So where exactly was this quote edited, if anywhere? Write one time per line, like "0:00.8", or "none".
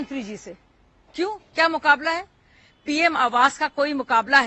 none